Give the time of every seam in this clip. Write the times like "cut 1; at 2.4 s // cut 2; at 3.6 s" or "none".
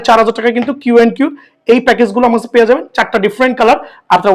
none